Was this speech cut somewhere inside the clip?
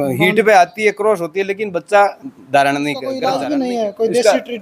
yes; 1 cut; at 3.1 s

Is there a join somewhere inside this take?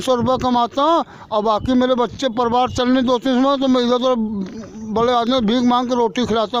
no; 0 cuts

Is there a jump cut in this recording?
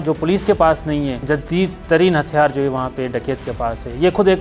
yes; 1 cut; at 1.2 s

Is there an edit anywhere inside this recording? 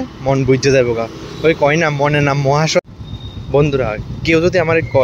yes; 1 cut; at 2.8 s

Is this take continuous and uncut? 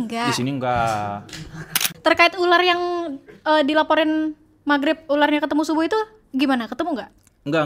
no; 1 cut; at 1.9 s

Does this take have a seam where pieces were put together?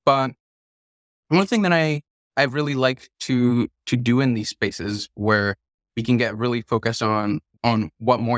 no; 0 cuts

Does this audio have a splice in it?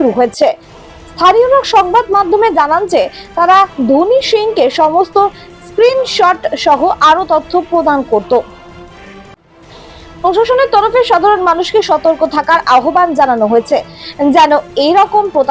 yes; 2 cuts; at 8.5 s, 10.2 s

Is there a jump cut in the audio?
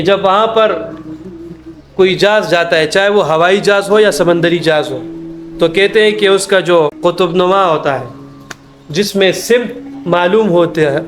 yes; 1 cut; at 7.0 s

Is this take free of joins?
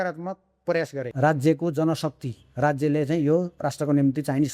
no; 1 cut; at 1.0 s

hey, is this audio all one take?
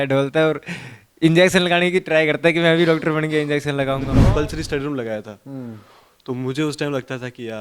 no; 1 cut; at 4.1 s

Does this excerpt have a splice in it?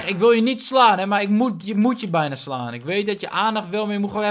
no; 0 cuts

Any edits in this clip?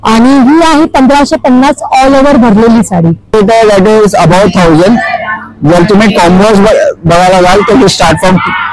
yes; 1 cut; at 3.3 s

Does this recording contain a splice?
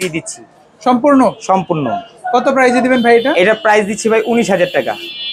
no; 0 cuts

